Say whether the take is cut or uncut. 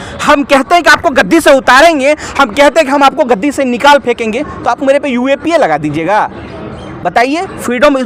uncut